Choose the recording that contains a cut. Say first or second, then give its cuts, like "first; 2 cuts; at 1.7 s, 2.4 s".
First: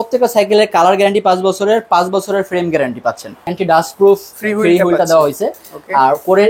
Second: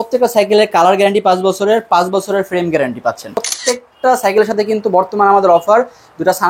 second; 1 cut; at 3.5 s